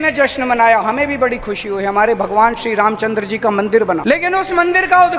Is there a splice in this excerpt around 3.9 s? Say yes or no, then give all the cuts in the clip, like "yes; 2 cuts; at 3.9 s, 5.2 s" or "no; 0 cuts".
yes; 1 cut; at 3.9 s